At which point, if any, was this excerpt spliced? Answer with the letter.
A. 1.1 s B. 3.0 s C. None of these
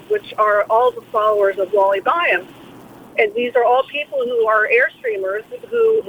B